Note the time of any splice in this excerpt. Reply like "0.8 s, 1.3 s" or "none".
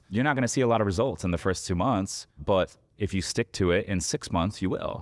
2.4 s